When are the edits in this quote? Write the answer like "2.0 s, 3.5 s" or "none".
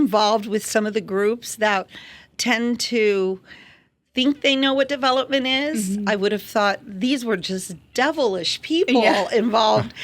2.3 s